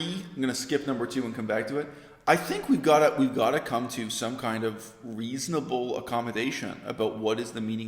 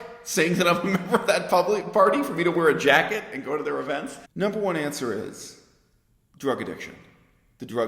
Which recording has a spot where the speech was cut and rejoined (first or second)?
second